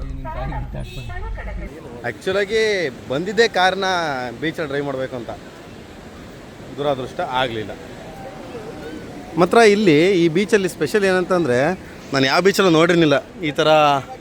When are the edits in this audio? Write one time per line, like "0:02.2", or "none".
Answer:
0:01.7